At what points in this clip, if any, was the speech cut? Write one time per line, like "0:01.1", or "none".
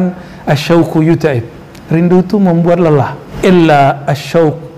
0:03.2